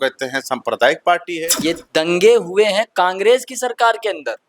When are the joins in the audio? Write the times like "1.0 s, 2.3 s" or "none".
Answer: 1.6 s